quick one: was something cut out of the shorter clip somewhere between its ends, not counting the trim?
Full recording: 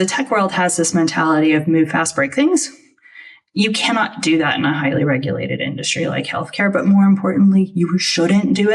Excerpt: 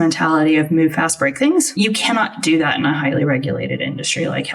yes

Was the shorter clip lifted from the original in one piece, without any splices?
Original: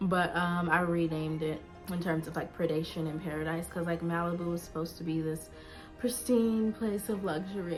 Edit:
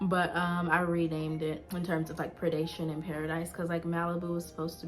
no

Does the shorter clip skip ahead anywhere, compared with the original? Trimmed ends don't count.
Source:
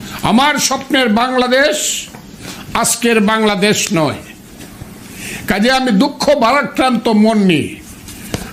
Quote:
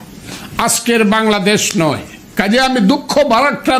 yes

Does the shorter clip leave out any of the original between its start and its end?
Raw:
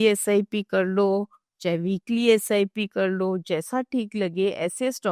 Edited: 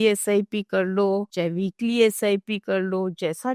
yes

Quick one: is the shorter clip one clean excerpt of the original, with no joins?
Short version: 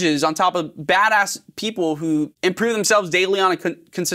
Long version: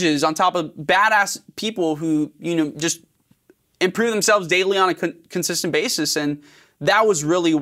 no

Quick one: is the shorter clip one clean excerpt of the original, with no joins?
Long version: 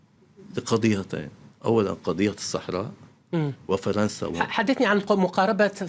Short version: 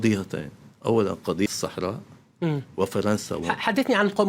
no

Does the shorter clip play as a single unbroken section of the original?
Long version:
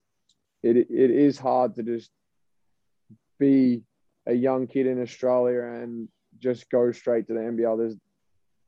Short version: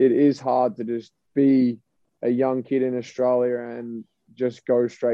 no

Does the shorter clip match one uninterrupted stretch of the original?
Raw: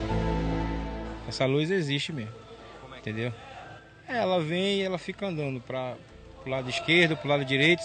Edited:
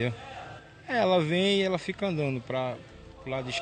yes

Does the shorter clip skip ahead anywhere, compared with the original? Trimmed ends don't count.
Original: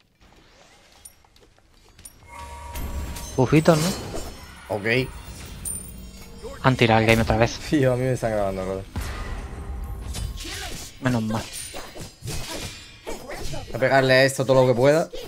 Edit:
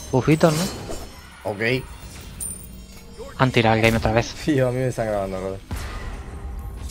no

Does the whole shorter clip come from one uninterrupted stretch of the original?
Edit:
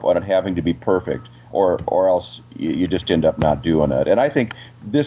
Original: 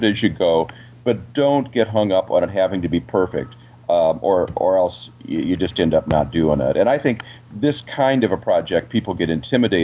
no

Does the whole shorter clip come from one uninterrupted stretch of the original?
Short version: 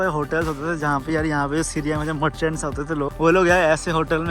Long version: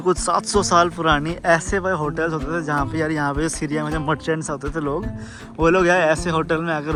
no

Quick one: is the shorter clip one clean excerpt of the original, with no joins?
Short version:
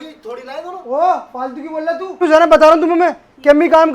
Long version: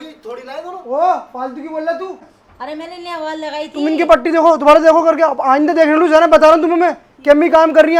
no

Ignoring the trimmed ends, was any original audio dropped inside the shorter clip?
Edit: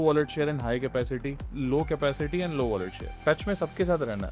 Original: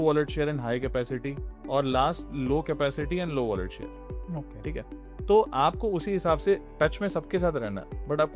yes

